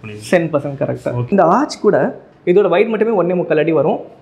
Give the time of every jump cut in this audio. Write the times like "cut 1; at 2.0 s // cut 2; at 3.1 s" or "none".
cut 1; at 1.3 s // cut 2; at 2.3 s